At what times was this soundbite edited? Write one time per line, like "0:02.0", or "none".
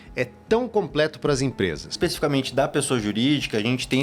0:01.9